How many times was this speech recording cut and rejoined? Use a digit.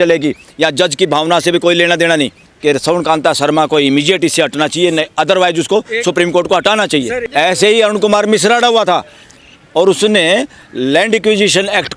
2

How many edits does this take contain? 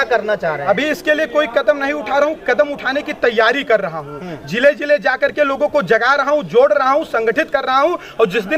0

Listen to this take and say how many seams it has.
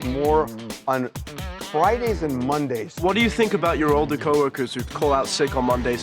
2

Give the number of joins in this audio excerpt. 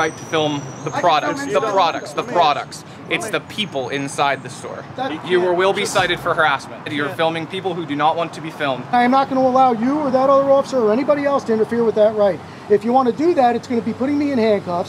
3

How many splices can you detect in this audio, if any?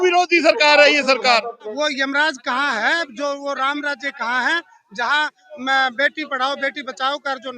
1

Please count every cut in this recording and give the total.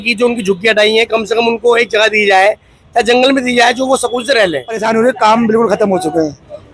1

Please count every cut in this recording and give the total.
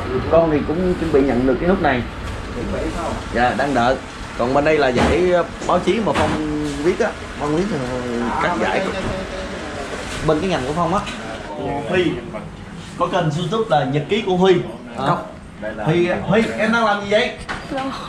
1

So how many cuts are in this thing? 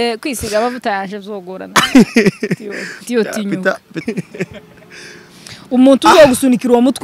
1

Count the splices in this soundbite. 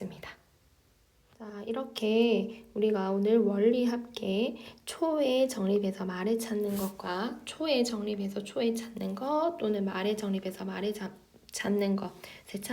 1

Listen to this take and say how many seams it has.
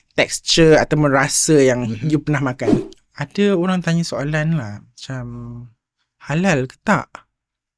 1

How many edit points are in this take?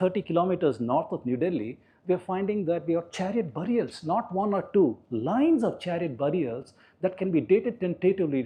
0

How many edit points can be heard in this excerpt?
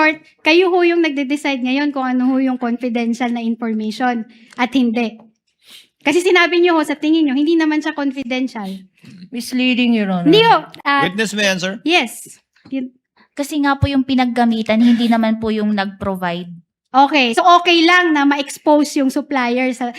0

